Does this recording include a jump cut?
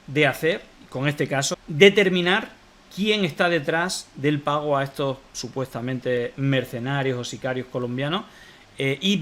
yes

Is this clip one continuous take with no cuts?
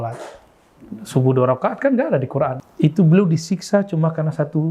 no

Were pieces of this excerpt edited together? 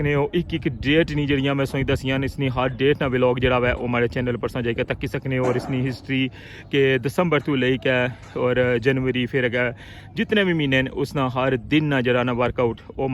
no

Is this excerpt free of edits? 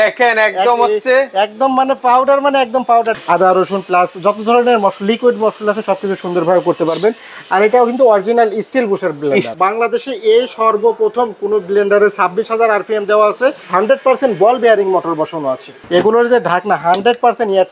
no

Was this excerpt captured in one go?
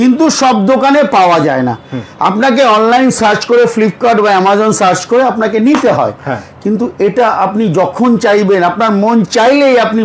yes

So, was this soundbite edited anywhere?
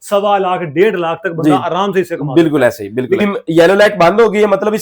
yes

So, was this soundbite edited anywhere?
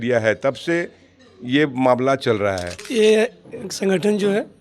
yes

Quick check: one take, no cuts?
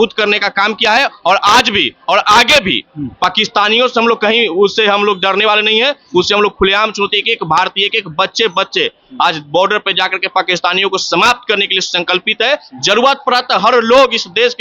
yes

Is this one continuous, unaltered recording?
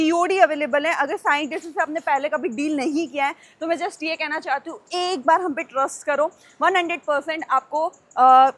yes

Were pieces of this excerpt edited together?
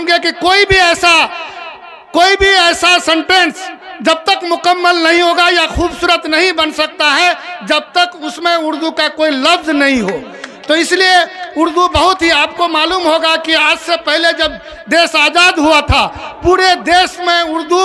no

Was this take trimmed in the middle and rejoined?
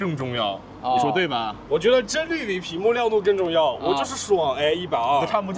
no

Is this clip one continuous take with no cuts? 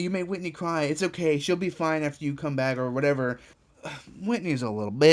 no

